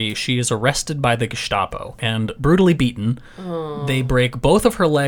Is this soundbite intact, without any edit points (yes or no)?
no